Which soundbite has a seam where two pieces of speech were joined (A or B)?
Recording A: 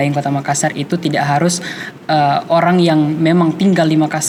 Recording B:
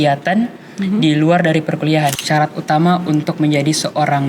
B